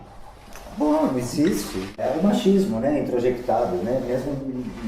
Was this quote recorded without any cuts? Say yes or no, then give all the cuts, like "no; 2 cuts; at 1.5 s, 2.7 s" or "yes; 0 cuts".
no; 1 cut; at 2.0 s